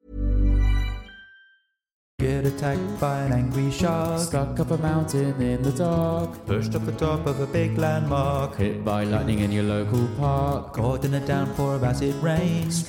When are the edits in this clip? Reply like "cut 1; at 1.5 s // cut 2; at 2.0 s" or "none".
cut 1; at 2.2 s